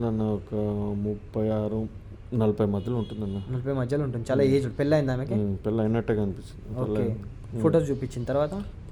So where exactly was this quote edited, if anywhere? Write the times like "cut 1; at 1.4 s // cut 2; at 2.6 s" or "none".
none